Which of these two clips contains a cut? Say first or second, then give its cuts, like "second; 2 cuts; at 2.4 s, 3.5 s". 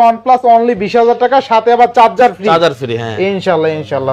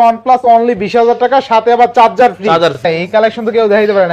second; 1 cut; at 2.8 s